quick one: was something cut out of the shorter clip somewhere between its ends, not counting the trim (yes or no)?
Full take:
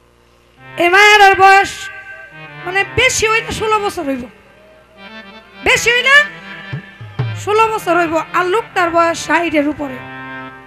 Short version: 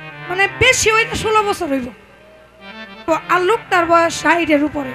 yes